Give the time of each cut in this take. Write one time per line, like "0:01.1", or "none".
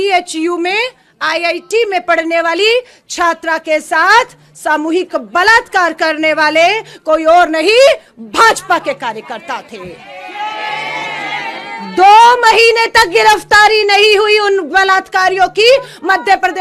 none